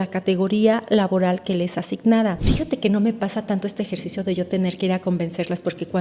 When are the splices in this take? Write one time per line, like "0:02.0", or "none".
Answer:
0:02.4